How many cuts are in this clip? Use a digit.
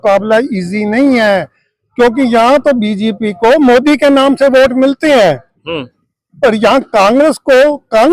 0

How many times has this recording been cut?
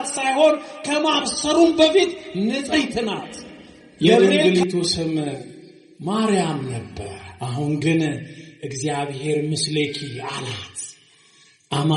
1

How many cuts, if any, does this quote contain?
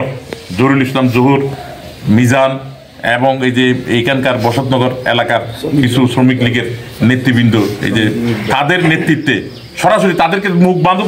0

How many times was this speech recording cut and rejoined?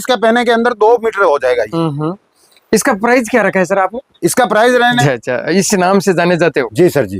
1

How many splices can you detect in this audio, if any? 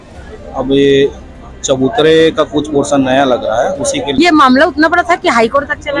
1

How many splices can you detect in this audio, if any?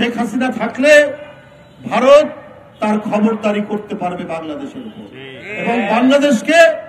0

